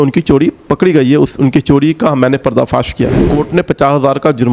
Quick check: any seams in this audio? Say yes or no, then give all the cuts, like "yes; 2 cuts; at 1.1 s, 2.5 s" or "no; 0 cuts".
yes; 1 cut; at 3.2 s